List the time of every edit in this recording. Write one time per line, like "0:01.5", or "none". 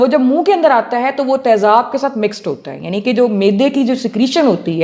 none